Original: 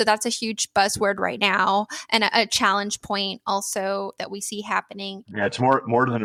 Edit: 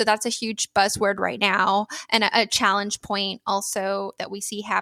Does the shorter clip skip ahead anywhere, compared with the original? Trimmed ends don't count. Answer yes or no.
no